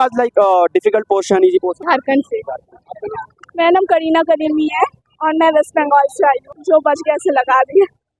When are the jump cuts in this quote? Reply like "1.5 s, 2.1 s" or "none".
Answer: 1.8 s, 6.5 s